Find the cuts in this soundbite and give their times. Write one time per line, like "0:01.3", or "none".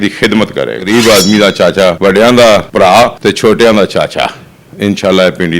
0:00.8
0:02.0
0:03.0